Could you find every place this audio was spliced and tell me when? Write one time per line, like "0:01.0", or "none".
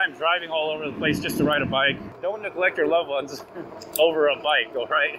0:02.1